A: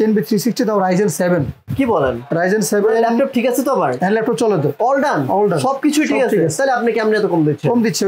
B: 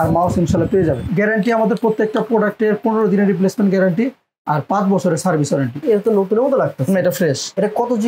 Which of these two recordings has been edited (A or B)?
B